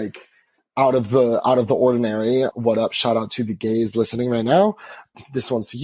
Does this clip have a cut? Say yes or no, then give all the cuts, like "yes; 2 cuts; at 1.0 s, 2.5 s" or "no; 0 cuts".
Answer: yes; 1 cut; at 2.5 s